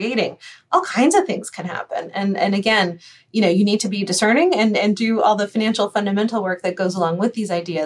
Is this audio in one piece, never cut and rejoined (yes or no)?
no